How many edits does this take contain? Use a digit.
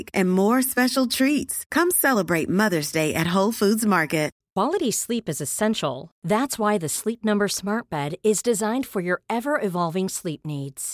1